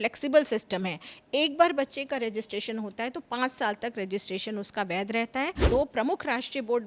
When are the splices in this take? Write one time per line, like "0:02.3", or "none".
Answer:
0:05.6